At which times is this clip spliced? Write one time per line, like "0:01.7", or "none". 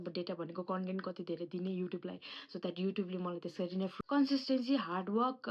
0:04.0